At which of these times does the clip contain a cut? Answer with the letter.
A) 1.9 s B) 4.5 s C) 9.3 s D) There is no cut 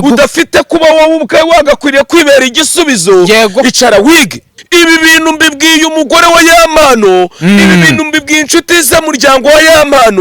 B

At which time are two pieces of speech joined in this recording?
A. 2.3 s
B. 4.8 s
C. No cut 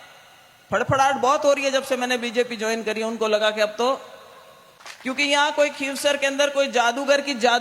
B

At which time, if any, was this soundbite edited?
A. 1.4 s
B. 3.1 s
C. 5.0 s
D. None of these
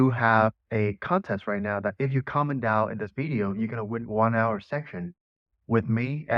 D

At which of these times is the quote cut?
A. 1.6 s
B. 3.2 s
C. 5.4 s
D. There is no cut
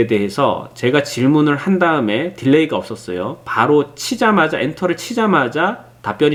D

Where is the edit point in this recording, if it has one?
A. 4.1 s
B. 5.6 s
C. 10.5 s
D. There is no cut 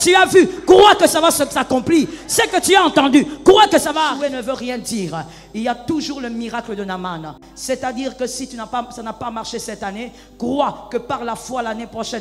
A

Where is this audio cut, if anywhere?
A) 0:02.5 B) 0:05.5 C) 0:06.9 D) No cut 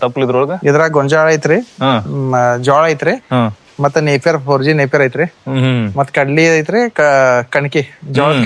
D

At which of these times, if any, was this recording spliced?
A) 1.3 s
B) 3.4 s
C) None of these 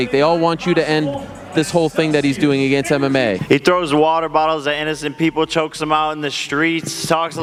C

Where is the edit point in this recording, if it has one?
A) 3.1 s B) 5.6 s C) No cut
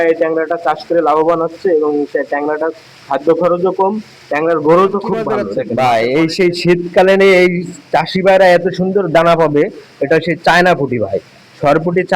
B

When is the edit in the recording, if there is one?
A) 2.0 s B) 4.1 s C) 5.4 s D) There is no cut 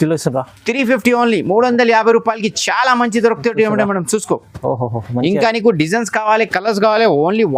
D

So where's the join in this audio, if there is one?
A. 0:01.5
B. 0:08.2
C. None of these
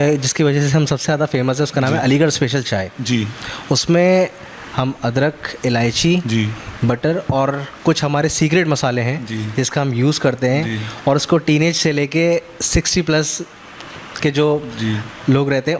C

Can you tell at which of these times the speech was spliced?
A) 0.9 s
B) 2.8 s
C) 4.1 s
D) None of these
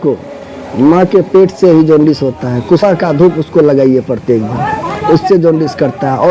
B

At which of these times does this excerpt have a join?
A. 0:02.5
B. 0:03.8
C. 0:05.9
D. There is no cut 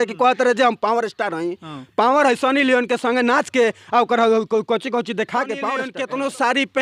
C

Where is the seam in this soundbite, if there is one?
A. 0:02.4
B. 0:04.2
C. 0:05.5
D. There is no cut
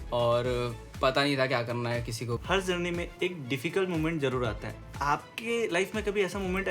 A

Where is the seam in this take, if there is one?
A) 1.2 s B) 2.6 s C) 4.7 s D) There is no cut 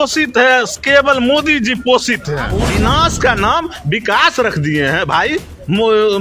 B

